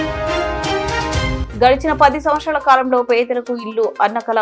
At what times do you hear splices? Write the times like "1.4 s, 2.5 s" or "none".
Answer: 1.4 s